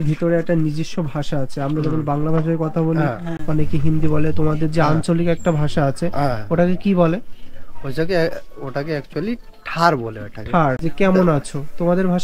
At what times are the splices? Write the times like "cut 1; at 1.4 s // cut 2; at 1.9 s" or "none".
cut 1; at 10.8 s

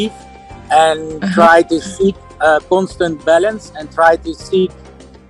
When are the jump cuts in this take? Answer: none

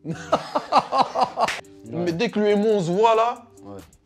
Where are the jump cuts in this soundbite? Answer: cut 1; at 1.6 s

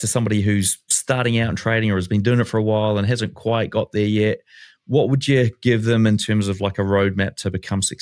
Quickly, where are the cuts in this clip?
none

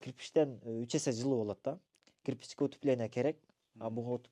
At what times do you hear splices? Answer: none

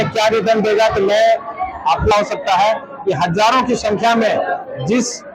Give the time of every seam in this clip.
cut 1; at 2.1 s

